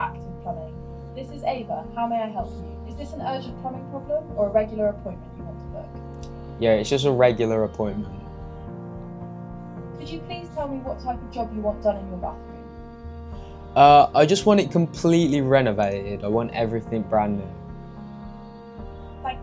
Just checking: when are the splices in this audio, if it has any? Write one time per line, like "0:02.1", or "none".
0:08.1
0:10.3